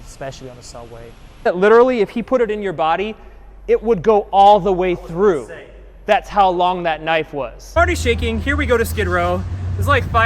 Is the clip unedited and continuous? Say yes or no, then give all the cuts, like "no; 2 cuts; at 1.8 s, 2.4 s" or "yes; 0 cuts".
no; 2 cuts; at 1.5 s, 7.7 s